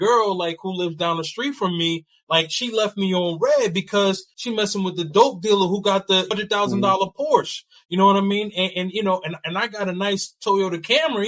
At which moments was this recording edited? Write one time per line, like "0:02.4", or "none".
0:04.3
0:06.3